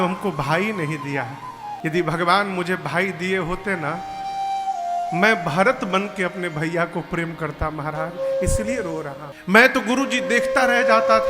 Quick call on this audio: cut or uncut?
cut